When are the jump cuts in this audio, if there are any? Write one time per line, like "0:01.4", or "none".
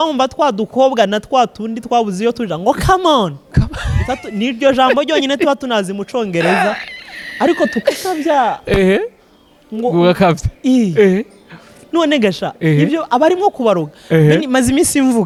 none